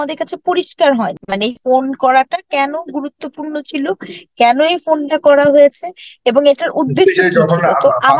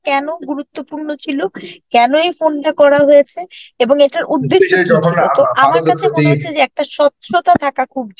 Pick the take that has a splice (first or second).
first